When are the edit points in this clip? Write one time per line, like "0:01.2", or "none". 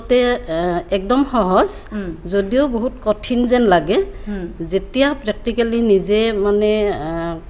none